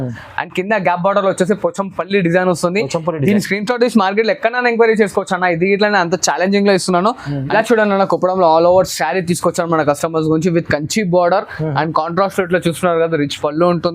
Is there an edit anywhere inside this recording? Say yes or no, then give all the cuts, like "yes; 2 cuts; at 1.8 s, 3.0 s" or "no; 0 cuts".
yes; 1 cut; at 7.3 s